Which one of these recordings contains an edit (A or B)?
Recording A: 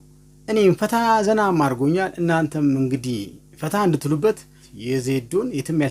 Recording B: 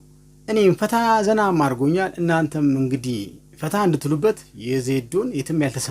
B